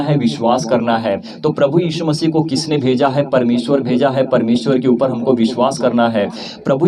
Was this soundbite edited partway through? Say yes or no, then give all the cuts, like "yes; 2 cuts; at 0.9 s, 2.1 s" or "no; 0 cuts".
yes; 1 cut; at 1.3 s